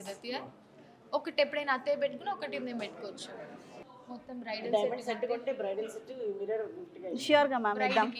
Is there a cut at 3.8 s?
yes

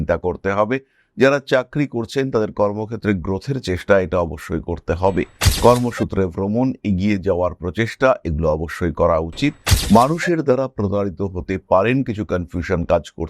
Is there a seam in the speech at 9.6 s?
yes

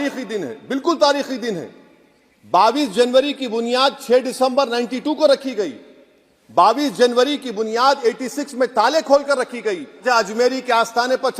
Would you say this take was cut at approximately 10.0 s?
yes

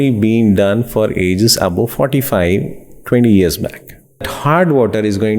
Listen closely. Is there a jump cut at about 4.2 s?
yes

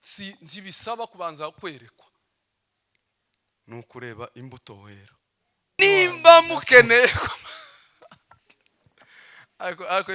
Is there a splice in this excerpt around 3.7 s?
no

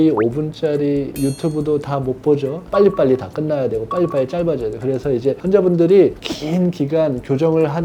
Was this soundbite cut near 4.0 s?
no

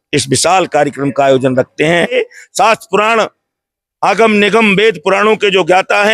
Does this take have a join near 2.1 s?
yes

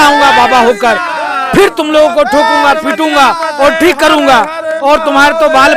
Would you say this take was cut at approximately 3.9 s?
no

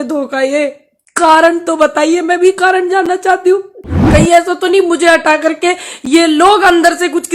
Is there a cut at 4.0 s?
yes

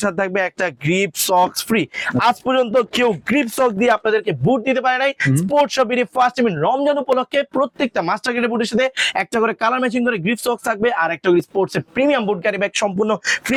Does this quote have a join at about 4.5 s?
no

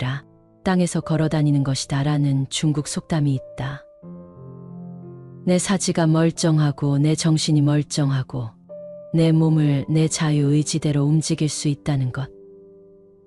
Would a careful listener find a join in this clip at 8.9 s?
no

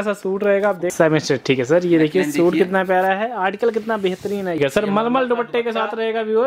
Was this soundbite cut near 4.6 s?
yes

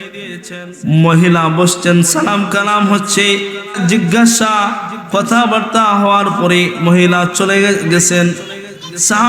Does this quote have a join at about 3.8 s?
yes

